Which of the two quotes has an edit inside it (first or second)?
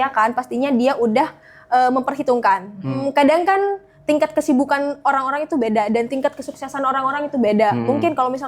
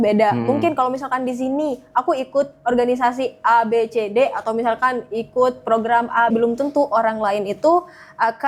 first